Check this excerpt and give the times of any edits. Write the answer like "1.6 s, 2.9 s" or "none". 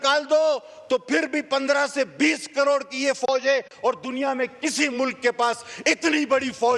none